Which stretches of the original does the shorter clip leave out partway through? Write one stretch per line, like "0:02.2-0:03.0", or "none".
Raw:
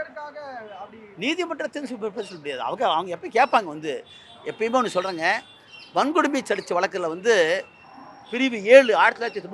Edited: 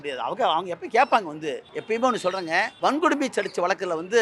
0:04.1-0:04.4
0:05.4-0:05.8